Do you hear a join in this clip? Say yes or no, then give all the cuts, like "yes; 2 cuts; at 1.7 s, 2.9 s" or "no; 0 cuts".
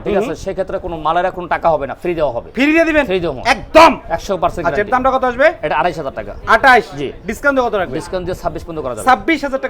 no; 0 cuts